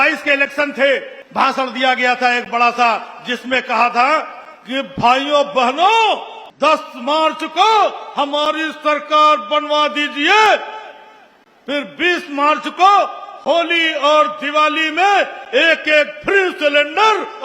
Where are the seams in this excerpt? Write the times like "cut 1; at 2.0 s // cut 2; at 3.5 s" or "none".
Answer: cut 1; at 1.2 s // cut 2; at 6.4 s